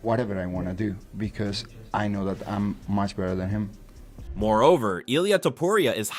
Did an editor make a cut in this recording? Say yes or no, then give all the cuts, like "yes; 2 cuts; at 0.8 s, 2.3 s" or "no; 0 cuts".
no; 0 cuts